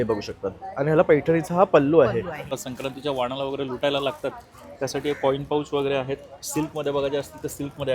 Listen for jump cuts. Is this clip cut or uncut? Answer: cut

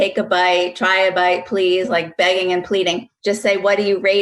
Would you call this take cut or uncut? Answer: cut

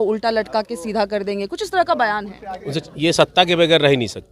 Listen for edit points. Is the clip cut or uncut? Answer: cut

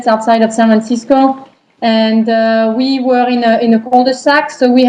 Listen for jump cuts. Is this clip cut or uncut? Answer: cut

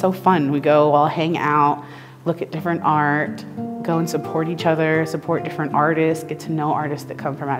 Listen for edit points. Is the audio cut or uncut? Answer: uncut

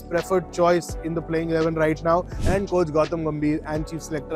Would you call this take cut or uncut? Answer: cut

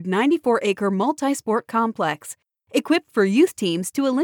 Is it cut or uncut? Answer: uncut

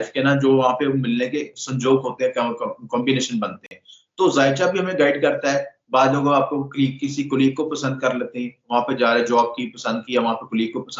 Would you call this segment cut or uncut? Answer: uncut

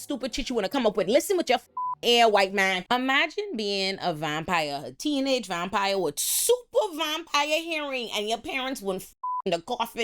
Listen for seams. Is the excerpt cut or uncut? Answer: cut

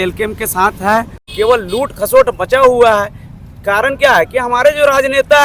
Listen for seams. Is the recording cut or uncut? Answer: cut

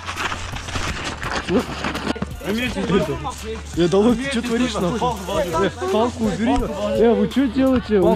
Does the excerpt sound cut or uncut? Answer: cut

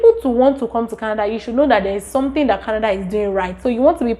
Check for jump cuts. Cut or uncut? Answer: uncut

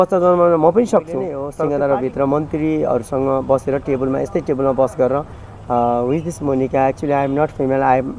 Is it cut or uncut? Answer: cut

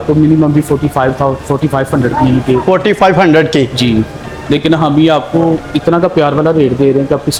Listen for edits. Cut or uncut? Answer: uncut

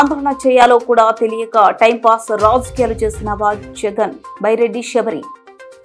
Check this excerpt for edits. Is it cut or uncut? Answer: uncut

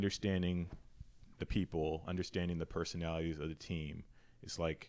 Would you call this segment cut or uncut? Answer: uncut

